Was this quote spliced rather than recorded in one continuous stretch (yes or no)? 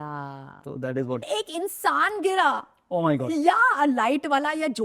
yes